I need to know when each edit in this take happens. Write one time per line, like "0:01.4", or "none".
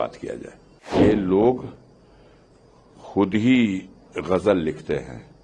0:00.9